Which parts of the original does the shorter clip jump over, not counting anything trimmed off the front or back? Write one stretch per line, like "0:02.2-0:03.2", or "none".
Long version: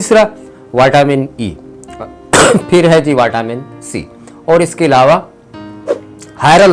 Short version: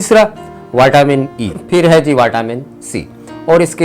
0:01.6-0:02.6